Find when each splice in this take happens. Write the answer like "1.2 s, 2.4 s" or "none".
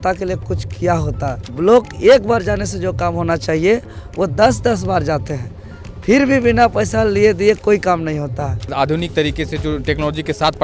1.4 s, 8.6 s